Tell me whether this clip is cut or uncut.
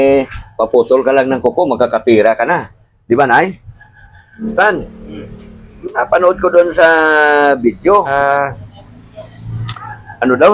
cut